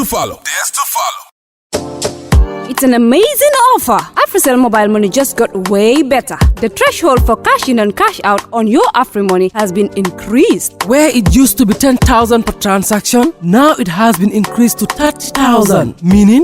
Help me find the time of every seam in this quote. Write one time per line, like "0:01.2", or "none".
0:01.2